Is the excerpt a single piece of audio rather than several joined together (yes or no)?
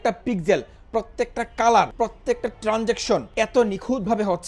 no